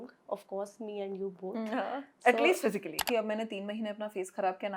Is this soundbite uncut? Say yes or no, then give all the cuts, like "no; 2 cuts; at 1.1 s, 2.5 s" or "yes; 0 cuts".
no; 1 cut; at 3.1 s